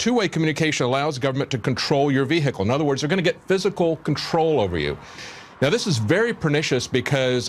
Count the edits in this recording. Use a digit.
1